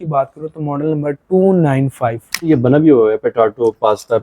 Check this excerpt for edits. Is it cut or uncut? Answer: cut